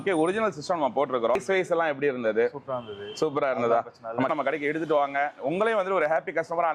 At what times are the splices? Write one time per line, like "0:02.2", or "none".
0:01.4
0:04.3